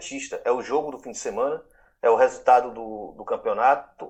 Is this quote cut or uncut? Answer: uncut